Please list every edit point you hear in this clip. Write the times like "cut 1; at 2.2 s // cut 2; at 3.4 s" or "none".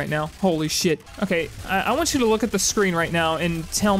cut 1; at 1.1 s